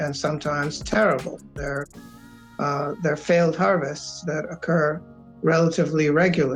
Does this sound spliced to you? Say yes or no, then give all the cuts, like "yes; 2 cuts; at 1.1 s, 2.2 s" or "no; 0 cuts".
no; 0 cuts